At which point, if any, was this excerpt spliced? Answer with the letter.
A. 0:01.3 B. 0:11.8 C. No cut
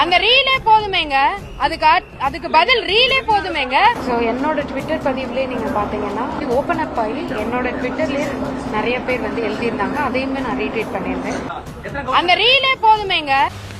A